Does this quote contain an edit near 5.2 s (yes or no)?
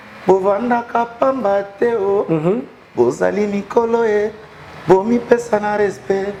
no